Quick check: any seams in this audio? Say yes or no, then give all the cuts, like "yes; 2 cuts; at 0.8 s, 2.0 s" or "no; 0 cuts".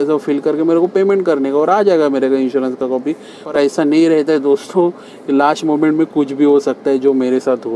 no; 0 cuts